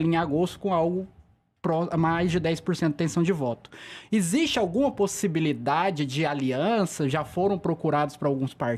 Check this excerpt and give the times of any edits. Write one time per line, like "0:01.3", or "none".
none